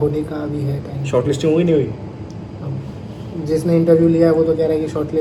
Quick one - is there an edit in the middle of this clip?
no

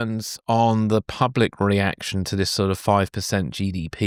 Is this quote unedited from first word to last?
yes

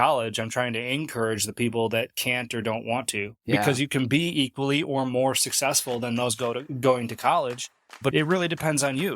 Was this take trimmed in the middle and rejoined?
yes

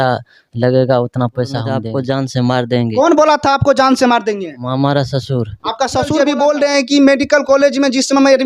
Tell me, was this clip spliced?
yes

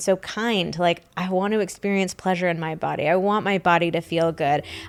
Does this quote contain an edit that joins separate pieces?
no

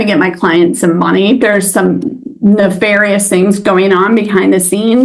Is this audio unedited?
no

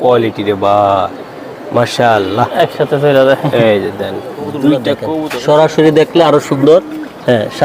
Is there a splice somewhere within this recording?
yes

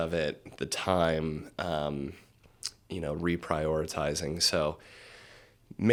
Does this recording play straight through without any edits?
yes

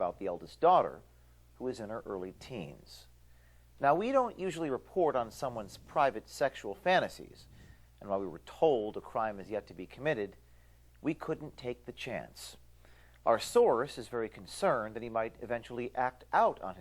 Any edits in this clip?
yes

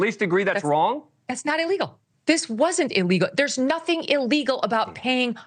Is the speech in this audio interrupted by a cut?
yes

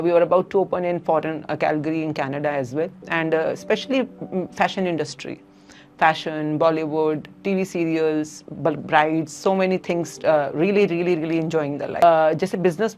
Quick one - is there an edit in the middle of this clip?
yes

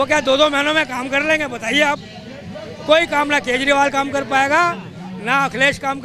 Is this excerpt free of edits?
yes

